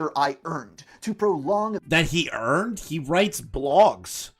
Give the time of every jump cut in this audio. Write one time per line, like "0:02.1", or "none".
none